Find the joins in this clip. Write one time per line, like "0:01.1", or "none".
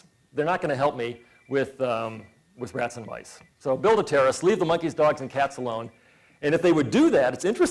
none